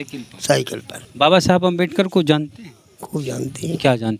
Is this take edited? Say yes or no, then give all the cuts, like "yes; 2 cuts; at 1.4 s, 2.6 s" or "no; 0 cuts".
yes; 1 cut; at 1.0 s